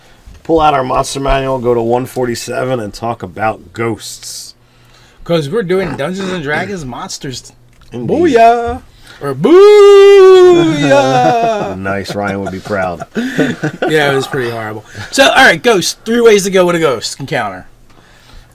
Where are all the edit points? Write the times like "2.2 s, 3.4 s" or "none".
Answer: 9.7 s